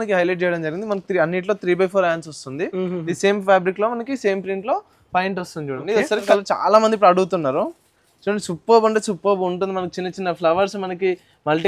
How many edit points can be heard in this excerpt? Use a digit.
1